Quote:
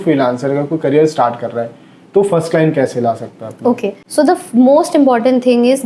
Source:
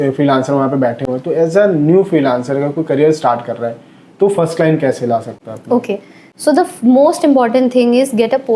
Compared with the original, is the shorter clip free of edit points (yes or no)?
no